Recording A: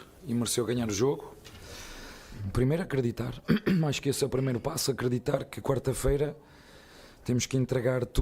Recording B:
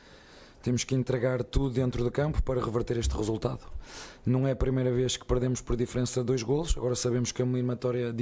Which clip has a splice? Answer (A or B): A